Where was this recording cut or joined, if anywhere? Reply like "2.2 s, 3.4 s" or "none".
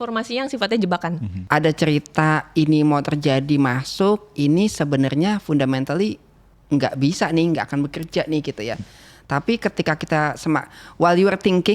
1.3 s